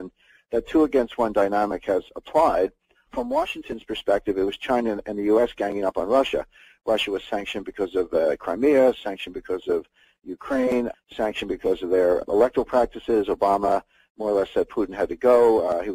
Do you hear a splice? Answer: yes; 1 cut; at 8.6 s

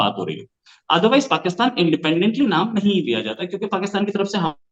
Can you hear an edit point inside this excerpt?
no; 0 cuts

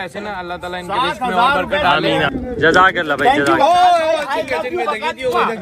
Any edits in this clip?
yes; 1 cut; at 2.3 s

